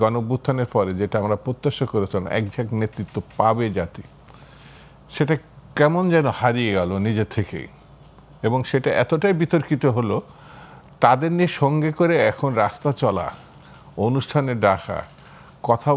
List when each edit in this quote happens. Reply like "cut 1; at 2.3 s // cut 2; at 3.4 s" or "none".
none